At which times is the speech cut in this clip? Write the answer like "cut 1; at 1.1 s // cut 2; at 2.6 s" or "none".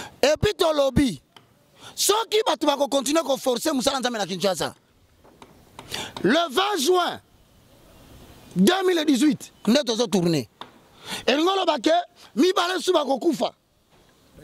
none